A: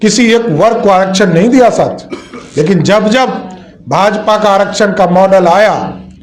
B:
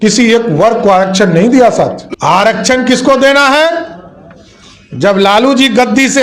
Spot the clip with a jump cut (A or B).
B